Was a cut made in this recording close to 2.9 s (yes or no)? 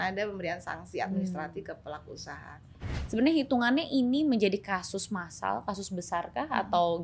yes